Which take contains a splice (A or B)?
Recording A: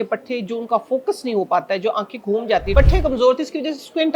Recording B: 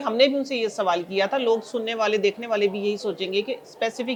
A